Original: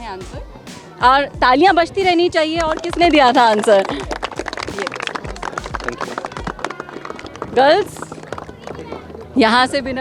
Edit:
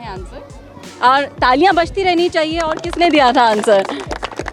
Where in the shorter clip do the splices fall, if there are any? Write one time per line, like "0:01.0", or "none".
none